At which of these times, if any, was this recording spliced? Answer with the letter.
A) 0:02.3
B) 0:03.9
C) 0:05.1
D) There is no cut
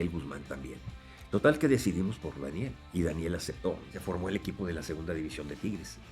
B